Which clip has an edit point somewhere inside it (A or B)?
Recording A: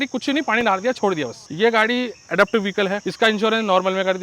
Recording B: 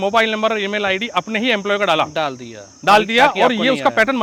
A